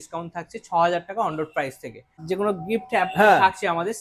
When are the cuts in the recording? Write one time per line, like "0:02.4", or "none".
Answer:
0:02.2